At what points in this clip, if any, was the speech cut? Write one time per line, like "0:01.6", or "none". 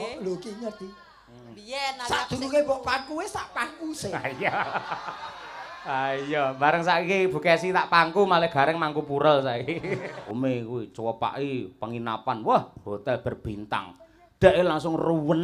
0:10.2

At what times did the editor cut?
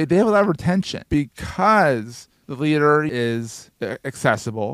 0:01.0
0:03.1

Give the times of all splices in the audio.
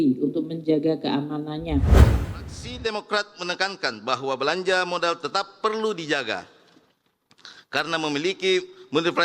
0:02.0

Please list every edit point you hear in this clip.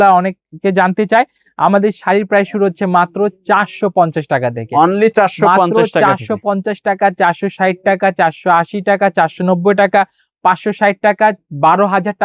none

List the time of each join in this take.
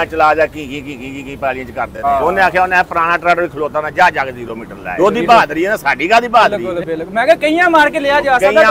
0:02.0
0:04.9
0:06.7

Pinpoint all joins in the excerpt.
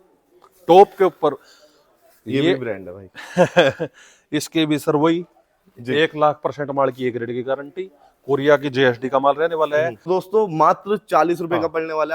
0:10.1

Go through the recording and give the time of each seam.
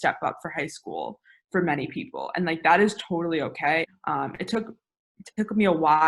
0:03.9

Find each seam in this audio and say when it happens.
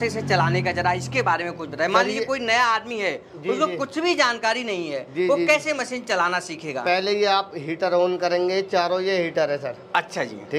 none

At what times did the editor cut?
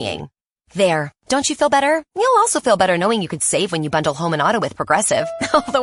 none

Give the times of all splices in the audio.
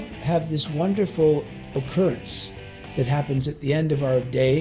none

